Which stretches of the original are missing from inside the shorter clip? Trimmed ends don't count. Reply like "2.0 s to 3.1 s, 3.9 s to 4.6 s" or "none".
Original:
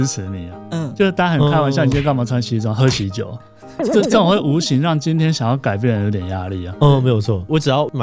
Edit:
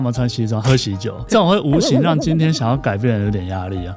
3.4 s to 4.1 s